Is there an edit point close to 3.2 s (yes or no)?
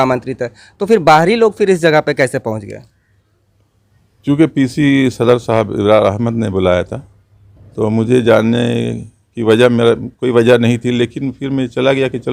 no